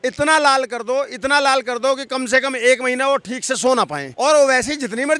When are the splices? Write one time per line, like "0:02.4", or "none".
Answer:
0:04.0